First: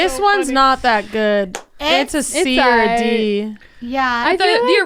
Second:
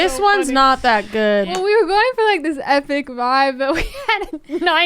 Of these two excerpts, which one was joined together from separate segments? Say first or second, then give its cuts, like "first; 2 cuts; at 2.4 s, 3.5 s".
second; 1 cut; at 1.5 s